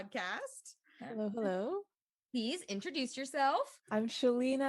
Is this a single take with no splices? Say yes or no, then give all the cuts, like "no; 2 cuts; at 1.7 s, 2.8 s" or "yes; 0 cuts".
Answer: no; 1 cut; at 3.8 s